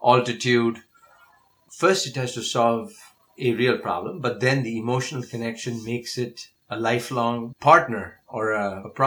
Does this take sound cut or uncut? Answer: cut